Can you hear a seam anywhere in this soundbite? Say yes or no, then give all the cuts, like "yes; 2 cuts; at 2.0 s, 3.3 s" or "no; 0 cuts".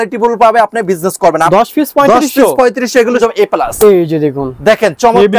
yes; 2 cuts; at 1.5 s, 3.2 s